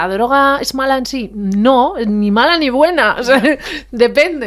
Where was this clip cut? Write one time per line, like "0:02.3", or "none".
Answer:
none